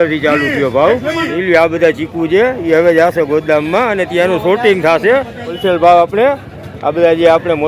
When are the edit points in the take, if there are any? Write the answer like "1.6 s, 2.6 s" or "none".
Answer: 1.3 s, 5.6 s